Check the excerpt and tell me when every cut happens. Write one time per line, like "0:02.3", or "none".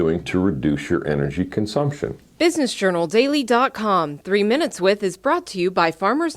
0:02.2